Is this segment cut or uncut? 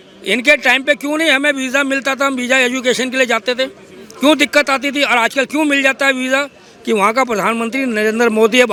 uncut